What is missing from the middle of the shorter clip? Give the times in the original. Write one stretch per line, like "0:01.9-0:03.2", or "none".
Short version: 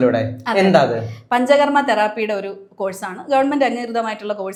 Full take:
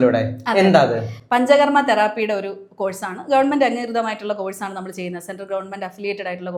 none